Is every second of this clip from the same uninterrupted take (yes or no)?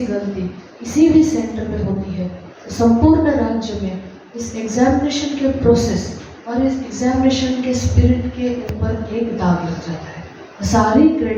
yes